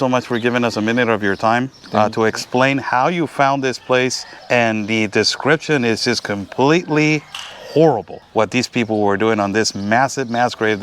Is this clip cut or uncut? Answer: cut